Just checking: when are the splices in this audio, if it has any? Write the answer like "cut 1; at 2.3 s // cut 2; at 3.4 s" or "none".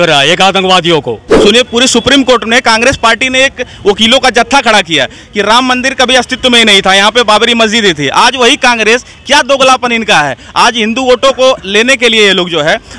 cut 1; at 1.3 s